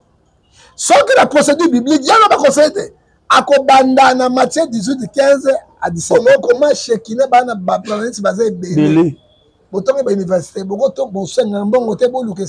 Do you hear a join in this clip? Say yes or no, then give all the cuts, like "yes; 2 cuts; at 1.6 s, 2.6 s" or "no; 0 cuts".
yes; 1 cut; at 6.1 s